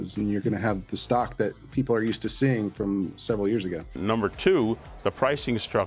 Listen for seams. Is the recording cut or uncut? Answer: cut